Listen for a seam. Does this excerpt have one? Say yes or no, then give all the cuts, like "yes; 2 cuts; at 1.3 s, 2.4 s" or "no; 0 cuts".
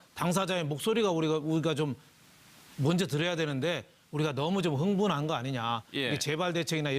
yes; 1 cut; at 4.4 s